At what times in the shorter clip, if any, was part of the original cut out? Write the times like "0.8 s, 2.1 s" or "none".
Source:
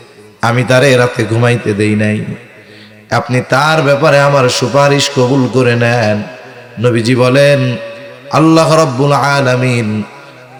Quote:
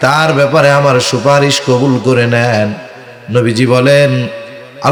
none